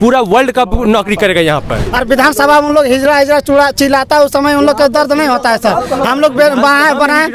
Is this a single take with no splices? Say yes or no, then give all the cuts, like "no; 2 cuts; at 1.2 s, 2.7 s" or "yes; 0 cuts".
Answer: no; 1 cut; at 1.8 s